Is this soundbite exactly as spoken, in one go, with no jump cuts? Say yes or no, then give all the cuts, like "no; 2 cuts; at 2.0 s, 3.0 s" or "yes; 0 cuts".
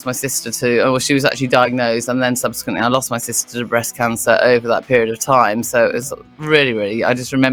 yes; 0 cuts